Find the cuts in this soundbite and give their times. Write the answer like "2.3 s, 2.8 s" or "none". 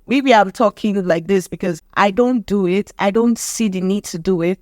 1.8 s